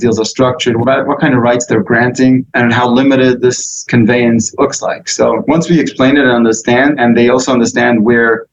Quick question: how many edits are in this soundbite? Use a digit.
6